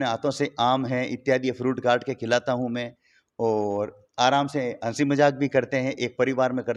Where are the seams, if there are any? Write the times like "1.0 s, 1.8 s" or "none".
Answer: none